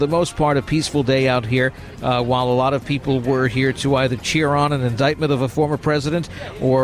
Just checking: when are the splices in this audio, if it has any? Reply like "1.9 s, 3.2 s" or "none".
none